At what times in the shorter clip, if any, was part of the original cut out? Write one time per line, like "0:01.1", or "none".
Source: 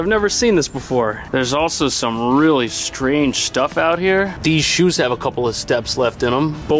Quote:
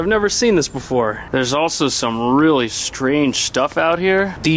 none